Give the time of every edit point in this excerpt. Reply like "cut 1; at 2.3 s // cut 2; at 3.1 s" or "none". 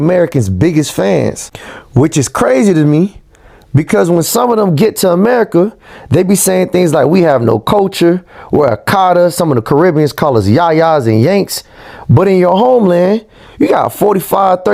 none

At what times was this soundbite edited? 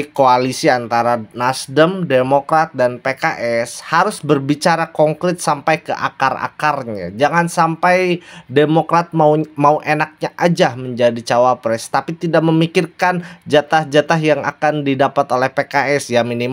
none

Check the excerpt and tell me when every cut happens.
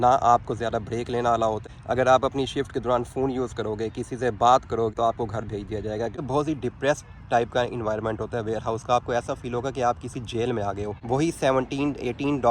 cut 1; at 1.7 s // cut 2; at 4.9 s // cut 3; at 6.2 s // cut 4; at 10.9 s

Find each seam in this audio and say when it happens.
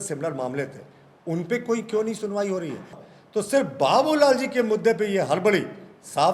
cut 1; at 3.0 s

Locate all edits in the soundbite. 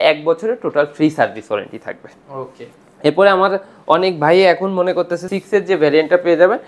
cut 1; at 5.2 s

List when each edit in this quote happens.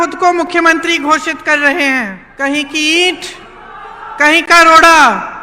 cut 1; at 2.2 s

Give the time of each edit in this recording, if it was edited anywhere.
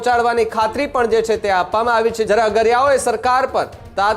cut 1; at 2.3 s

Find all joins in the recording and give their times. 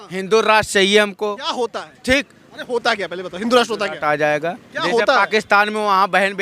none

